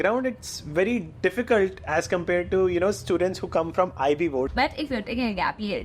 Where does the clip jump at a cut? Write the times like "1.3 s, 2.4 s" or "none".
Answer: 4.5 s